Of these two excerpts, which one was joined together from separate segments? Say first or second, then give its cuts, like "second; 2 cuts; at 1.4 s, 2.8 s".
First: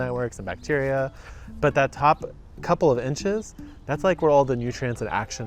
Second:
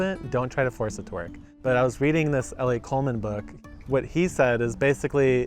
second; 2 cuts; at 1.4 s, 3.5 s